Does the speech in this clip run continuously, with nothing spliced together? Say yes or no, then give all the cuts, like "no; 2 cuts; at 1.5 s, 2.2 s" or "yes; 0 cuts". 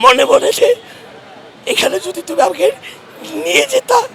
yes; 0 cuts